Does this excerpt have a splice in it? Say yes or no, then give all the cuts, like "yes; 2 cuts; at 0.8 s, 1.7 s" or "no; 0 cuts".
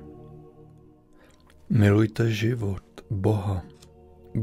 yes; 1 cut; at 1.0 s